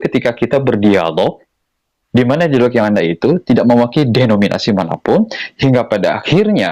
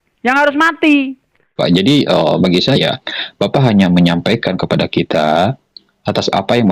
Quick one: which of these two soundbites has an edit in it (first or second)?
second